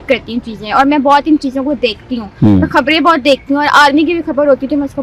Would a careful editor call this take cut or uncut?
uncut